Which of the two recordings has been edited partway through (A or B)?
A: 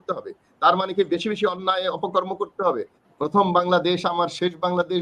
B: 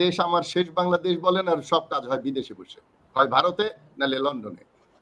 A